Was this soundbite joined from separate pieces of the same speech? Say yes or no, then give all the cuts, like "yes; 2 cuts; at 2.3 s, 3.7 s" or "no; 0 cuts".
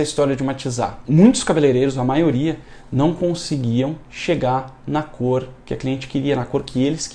yes; 1 cut; at 1.0 s